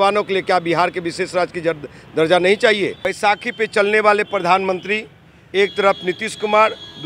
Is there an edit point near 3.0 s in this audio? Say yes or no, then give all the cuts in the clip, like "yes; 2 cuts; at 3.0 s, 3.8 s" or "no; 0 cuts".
yes; 1 cut; at 3.0 s